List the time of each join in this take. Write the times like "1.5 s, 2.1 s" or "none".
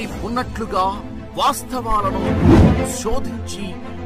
none

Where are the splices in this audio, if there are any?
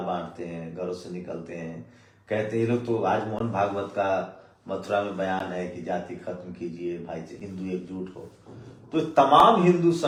none

